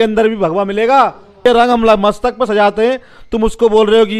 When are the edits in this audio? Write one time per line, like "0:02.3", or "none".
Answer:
0:01.4